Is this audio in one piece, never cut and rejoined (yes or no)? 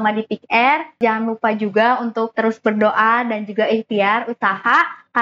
no